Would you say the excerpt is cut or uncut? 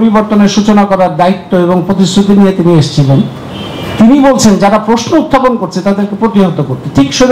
uncut